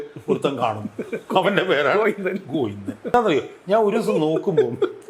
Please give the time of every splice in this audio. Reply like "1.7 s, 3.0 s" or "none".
3.1 s